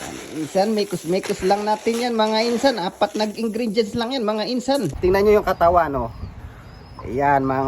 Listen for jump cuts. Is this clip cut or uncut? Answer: cut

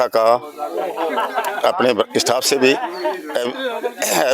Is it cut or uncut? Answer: uncut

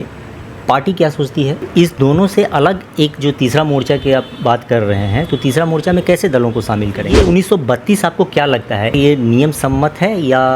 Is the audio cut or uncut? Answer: cut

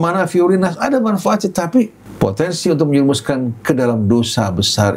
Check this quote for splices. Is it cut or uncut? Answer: cut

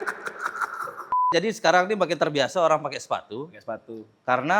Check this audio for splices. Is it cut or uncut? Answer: cut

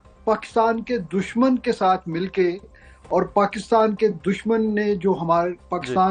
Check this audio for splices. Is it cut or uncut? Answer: uncut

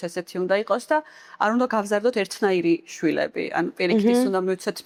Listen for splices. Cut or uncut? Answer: uncut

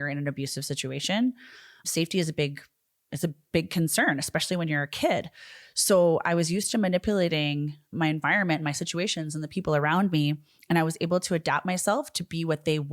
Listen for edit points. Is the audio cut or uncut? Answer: uncut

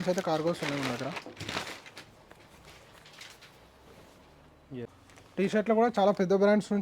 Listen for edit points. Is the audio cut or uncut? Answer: cut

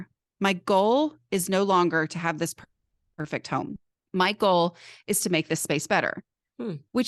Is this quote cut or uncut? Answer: uncut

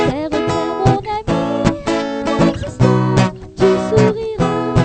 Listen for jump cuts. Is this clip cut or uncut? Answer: uncut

